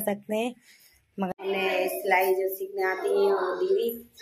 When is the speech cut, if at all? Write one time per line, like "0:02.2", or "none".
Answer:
0:01.3